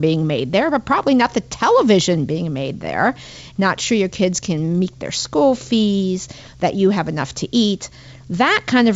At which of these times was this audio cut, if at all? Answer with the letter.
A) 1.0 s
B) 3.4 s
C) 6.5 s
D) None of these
B